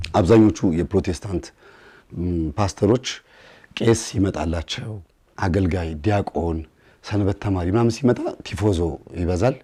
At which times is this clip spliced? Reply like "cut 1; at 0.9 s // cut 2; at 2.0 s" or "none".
none